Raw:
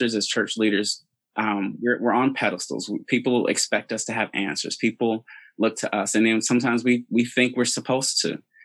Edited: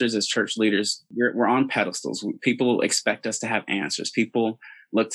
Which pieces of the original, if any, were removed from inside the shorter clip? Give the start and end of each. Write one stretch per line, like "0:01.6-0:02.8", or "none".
0:01.1-0:01.7